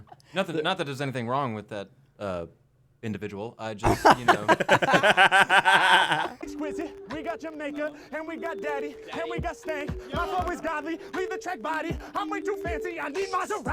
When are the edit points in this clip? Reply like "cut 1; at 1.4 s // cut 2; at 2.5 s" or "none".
cut 1; at 6.4 s